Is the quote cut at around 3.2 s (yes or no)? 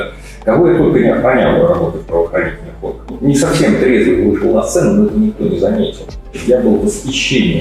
yes